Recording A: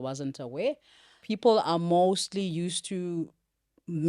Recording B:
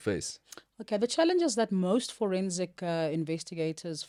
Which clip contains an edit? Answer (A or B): A